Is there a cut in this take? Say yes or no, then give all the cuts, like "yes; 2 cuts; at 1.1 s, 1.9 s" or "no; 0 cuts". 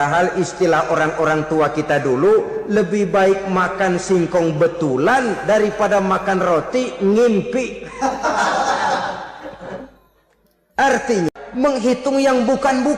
yes; 1 cut; at 11.3 s